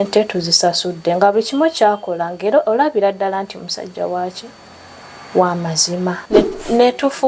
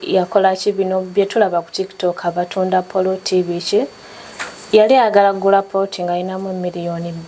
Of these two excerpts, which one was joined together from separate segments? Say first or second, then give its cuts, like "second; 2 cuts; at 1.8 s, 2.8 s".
first; 1 cut; at 6.2 s